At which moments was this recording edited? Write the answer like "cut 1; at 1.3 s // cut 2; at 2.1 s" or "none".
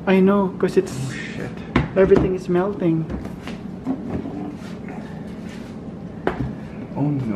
none